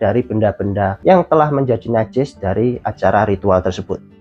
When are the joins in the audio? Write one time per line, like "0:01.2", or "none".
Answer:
0:00.9